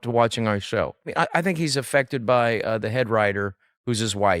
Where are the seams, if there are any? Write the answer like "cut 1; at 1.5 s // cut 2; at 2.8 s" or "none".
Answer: cut 1; at 1.1 s